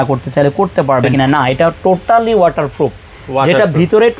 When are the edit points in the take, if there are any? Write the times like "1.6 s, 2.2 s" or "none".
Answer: 1.1 s